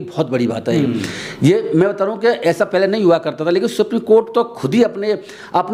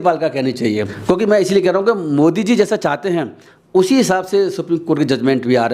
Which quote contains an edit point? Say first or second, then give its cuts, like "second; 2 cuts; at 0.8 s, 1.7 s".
second; 1 cut; at 0.9 s